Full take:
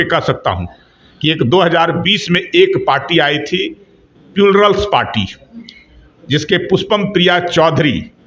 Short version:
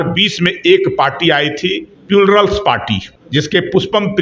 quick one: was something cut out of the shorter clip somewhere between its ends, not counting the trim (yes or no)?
yes